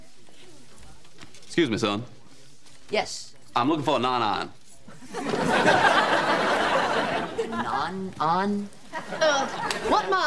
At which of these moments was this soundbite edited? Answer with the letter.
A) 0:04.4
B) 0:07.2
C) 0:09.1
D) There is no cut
D